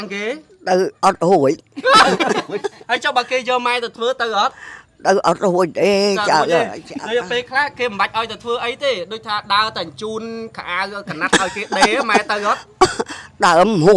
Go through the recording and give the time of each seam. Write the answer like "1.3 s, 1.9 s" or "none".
none

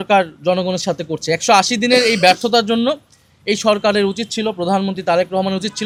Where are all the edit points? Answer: none

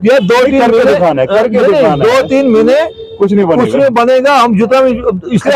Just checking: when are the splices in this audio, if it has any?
none

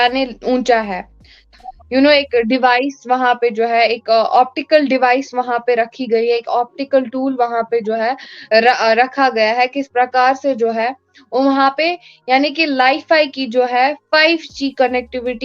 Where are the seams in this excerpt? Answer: 1.5 s

